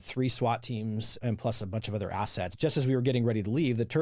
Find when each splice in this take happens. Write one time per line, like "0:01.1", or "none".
0:01.2
0:02.5